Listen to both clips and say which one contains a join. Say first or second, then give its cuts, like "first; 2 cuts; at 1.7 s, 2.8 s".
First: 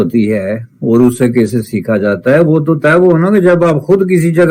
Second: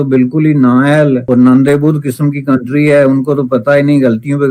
second; 1 cut; at 1.2 s